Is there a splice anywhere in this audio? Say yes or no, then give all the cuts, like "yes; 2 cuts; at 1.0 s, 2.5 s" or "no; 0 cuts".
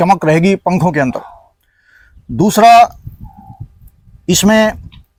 no; 0 cuts